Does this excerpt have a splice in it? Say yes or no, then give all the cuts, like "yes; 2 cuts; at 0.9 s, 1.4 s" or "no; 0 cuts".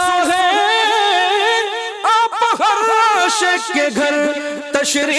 no; 0 cuts